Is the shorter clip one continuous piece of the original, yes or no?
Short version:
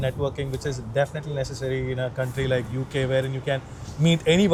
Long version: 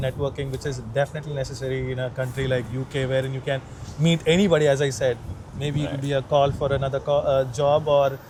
yes